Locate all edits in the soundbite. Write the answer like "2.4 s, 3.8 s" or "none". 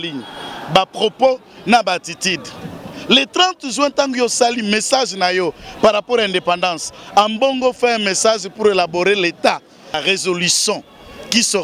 10.0 s